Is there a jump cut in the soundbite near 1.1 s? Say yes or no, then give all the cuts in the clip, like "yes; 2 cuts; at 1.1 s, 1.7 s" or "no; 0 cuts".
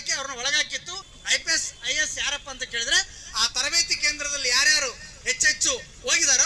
yes; 1 cut; at 1.1 s